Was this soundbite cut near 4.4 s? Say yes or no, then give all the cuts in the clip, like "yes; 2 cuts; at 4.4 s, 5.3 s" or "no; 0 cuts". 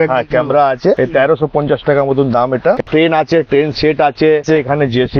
yes; 2 cuts; at 2.8 s, 4.4 s